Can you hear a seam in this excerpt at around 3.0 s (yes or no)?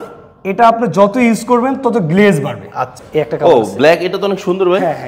yes